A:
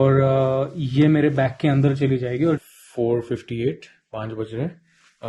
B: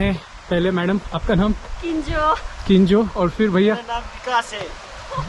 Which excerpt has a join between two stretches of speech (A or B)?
A